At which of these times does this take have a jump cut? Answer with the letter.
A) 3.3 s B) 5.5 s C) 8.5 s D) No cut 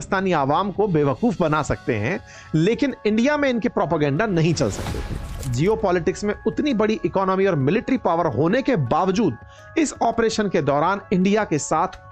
B